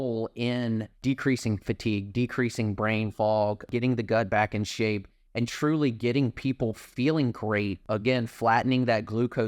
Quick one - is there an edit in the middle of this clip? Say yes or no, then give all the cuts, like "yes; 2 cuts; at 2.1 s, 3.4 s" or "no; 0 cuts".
yes; 3 cuts; at 0.9 s, 3.7 s, 7.8 s